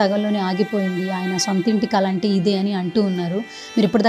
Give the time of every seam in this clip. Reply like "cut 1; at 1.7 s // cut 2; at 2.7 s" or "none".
none